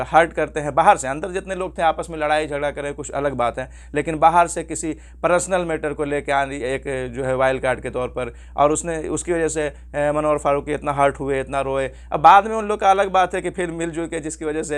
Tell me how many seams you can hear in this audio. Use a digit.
0